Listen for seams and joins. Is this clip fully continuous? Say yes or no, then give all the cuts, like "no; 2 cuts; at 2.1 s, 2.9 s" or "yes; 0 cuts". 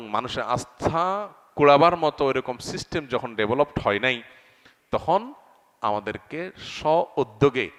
yes; 0 cuts